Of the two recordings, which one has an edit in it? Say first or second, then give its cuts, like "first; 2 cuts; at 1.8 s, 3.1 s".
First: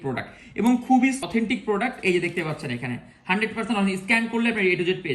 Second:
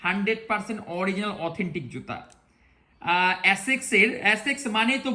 first; 1 cut; at 1.2 s